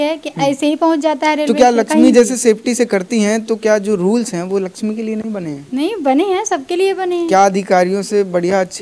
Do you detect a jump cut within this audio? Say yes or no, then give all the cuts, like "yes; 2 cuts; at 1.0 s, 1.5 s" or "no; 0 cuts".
no; 0 cuts